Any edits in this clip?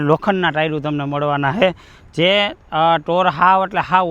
no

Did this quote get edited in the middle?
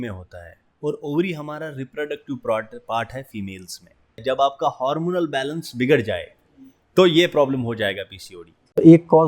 yes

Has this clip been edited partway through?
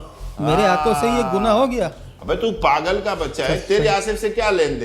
yes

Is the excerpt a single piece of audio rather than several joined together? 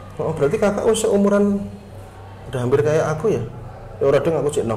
yes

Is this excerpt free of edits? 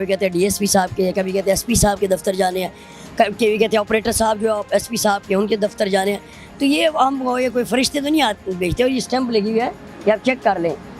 yes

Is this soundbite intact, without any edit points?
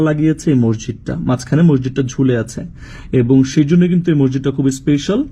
yes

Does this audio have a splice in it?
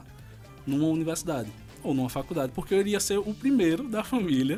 no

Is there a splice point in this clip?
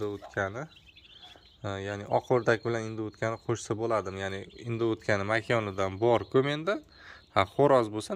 no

